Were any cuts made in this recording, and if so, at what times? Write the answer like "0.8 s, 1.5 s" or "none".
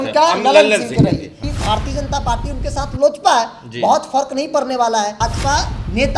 1.3 s, 5.2 s